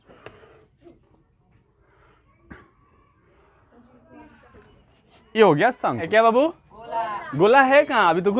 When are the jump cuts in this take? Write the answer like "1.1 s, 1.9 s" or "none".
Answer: 6.1 s